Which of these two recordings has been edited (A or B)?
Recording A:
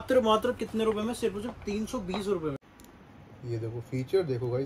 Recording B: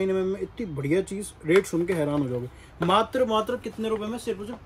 A